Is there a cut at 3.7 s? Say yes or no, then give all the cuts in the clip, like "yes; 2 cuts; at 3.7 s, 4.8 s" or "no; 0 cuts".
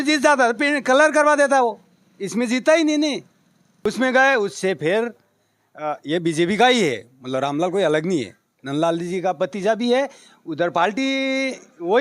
yes; 1 cut; at 3.7 s